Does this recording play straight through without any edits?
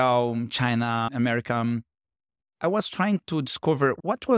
no; 1 cut; at 1.1 s

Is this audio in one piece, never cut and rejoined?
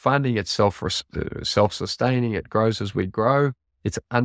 yes; 0 cuts

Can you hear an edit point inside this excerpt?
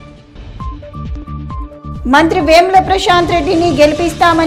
yes; 1 cut; at 1.9 s

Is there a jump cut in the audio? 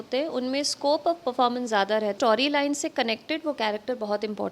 yes; 1 cut; at 2.1 s

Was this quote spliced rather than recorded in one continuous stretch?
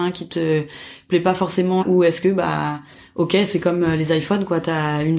yes; 1 cut; at 1.8 s

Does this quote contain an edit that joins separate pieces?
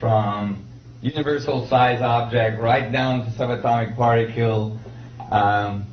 no; 0 cuts

